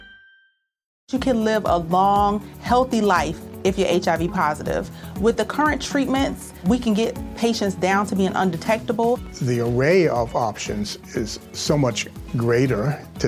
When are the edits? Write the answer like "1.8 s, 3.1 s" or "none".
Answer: 1.0 s

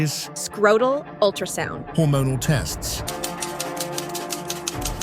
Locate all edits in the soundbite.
3.0 s

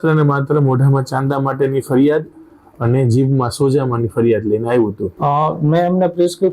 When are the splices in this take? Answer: 5.1 s

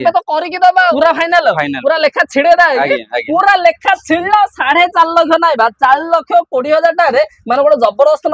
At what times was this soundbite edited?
0.9 s

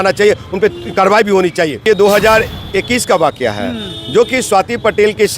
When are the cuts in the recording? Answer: 1.8 s

